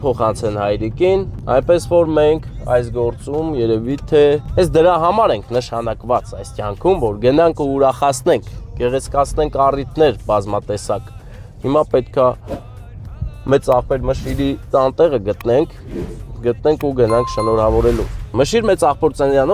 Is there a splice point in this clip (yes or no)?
no